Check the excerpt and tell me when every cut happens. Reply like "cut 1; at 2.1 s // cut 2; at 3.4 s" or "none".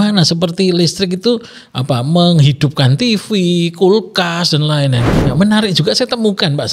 cut 1; at 5.1 s

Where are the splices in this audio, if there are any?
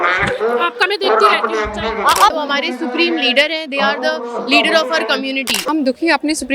cut 1; at 2.3 s // cut 2; at 5.5 s

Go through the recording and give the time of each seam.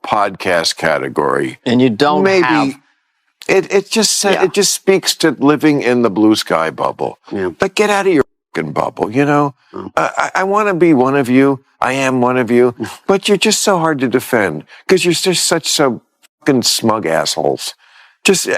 none

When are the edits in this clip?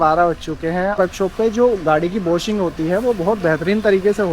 cut 1; at 0.9 s

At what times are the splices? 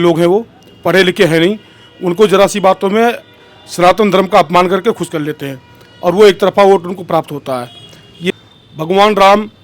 cut 1; at 8.3 s

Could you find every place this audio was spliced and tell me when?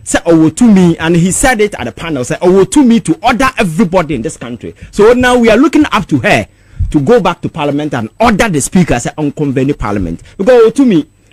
none

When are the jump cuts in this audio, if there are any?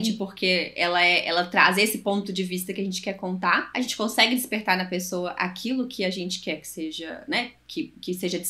cut 1; at 3.7 s

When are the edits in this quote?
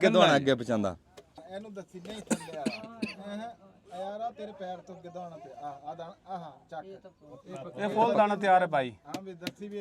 cut 1; at 1.4 s

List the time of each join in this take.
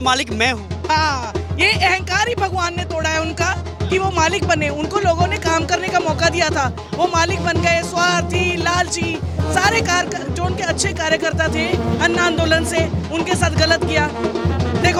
none

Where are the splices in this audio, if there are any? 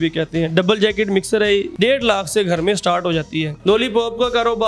cut 1; at 1.7 s // cut 2; at 3.5 s

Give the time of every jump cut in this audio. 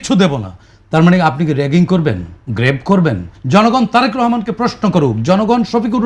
cut 1; at 3.3 s

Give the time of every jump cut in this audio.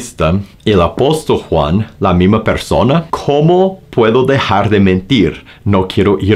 cut 1; at 3.1 s

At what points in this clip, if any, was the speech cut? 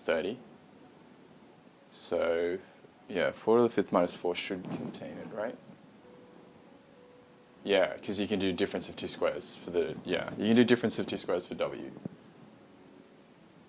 cut 1; at 7.2 s

